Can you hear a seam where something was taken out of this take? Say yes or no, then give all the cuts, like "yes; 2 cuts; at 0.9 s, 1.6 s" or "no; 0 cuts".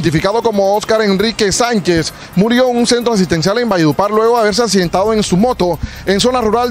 no; 0 cuts